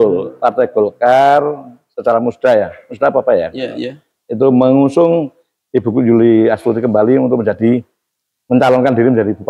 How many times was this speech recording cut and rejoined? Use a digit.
0